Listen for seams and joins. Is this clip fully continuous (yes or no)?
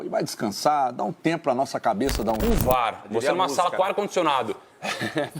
no